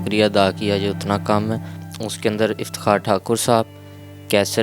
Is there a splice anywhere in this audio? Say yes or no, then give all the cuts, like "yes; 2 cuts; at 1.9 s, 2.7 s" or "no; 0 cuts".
yes; 1 cut; at 1.8 s